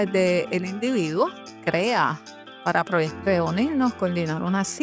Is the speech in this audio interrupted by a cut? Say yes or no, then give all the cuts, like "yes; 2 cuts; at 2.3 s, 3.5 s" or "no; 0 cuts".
yes; 2 cuts; at 1.6 s, 3.1 s